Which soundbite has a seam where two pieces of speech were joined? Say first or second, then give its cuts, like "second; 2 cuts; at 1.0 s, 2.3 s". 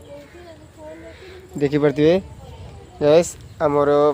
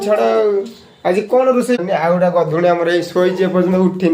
second; 1 cut; at 1.8 s